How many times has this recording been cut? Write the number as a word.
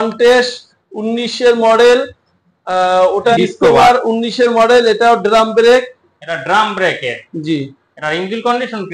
one